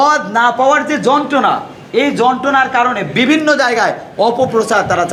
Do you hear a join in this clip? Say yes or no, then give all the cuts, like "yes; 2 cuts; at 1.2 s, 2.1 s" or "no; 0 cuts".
no; 0 cuts